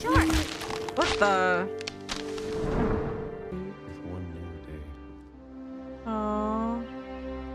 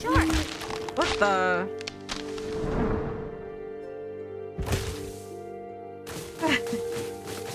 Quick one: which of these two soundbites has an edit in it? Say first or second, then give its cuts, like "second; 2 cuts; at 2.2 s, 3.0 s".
first; 1 cut; at 3.5 s